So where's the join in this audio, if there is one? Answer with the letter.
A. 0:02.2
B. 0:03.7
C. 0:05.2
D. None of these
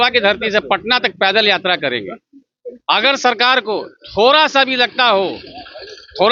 D